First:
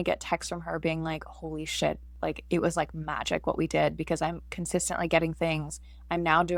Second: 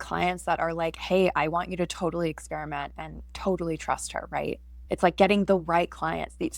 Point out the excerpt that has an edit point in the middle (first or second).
second